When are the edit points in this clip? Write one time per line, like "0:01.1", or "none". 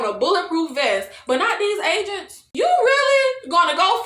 0:02.4

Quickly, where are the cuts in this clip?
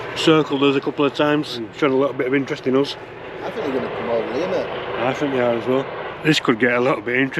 0:01.7
0:03.5
0:06.0

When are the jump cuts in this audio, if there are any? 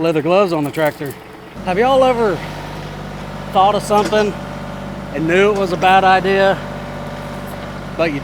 0:01.6

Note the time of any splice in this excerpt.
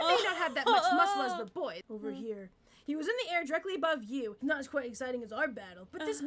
0:01.8
0:04.4

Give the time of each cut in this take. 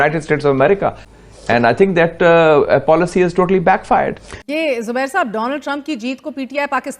0:01.0
0:04.3

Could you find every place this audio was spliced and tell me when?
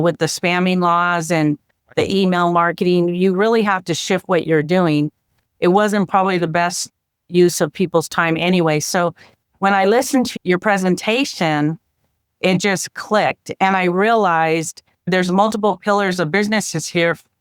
none

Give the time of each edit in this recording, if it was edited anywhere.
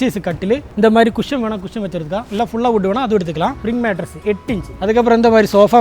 0:03.6
0:04.7

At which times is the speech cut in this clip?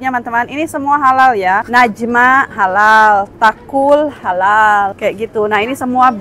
0:01.7
0:04.9

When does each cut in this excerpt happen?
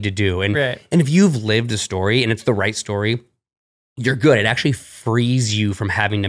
none

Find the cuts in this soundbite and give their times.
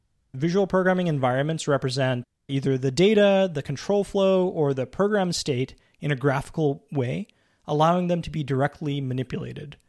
0:02.3

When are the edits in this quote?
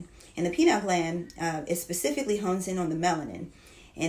none

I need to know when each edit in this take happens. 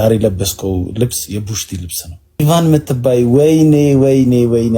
0:02.4

